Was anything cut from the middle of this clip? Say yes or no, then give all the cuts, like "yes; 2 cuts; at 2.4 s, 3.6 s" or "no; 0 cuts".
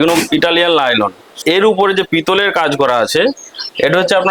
yes; 1 cut; at 1.3 s